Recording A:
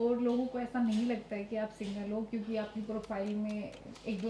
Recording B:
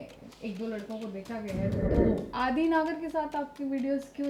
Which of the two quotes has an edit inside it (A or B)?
B